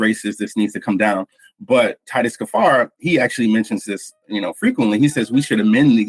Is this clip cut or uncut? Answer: uncut